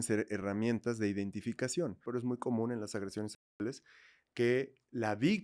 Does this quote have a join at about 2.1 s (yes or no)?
yes